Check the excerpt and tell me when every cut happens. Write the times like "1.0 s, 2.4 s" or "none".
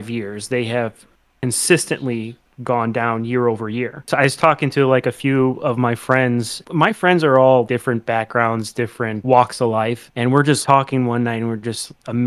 4.1 s, 6.6 s, 7.7 s, 9.2 s, 10.5 s